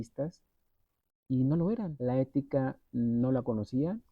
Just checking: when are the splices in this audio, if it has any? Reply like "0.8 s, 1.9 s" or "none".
1.9 s